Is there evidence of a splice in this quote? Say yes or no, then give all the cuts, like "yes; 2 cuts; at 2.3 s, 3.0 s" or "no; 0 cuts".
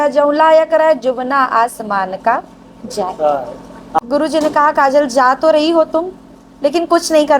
yes; 1 cut; at 4.0 s